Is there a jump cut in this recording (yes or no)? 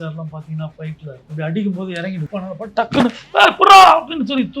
yes